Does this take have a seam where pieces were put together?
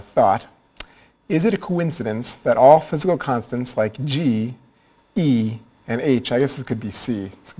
yes; 1 cut; at 6.6 s

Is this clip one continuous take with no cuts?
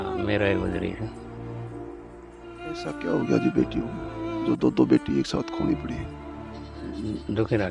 no; 3 cuts; at 1.2 s, 2.8 s, 6.7 s

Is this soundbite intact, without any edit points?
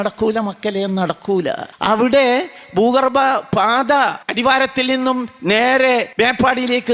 no; 3 cuts; at 1.7 s, 4.2 s, 6.1 s

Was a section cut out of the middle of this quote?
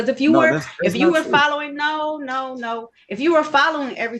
no; 0 cuts

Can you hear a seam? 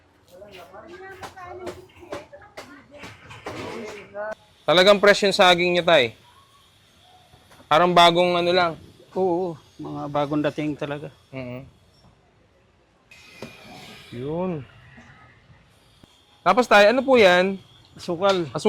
yes; 2 cuts; at 4.3 s, 13.1 s

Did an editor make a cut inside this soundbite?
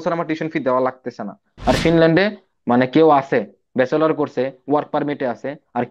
yes; 1 cut; at 1.5 s

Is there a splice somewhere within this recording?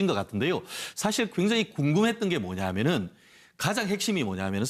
yes; 1 cut; at 1.1 s

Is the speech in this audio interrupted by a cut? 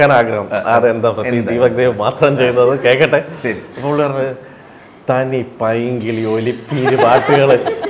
no; 0 cuts

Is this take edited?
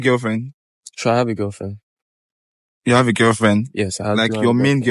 no; 0 cuts

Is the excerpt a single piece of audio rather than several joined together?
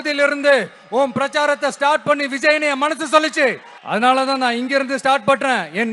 no; 1 cut; at 3.7 s

